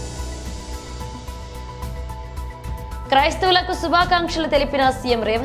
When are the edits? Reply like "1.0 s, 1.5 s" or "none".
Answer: none